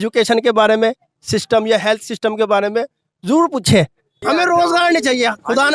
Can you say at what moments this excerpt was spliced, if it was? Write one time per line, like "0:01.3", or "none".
0:04.1